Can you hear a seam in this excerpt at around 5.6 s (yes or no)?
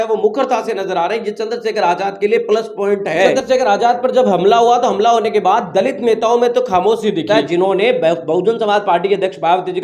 no